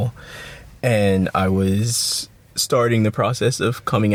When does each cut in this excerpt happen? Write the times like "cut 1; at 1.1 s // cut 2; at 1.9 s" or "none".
none